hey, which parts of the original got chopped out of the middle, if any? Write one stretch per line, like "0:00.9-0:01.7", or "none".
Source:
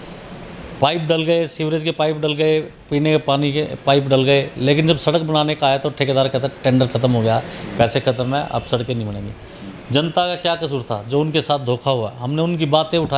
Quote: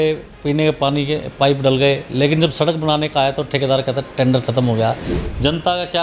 0:07.6-0:09.6